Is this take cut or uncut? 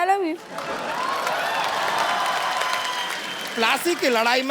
cut